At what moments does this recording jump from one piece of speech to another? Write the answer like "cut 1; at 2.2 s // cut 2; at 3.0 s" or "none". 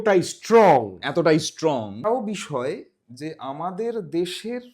cut 1; at 2.0 s